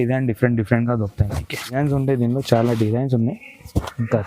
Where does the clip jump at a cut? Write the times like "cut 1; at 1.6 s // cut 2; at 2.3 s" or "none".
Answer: cut 1; at 1.7 s

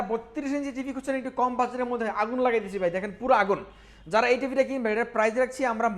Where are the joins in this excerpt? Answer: none

